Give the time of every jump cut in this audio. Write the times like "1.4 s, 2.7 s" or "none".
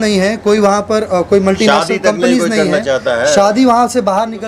none